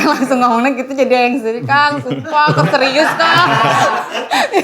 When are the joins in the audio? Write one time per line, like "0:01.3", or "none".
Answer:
none